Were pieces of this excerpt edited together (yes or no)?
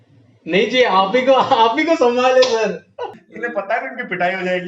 yes